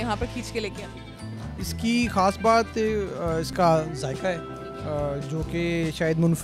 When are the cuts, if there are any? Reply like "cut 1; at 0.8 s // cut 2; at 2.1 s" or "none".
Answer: none